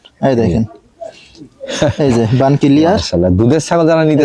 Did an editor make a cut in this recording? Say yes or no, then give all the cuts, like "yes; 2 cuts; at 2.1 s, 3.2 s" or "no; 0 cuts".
no; 0 cuts